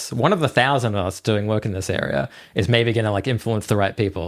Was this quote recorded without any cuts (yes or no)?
yes